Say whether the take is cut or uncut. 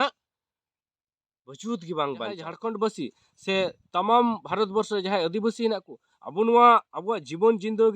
cut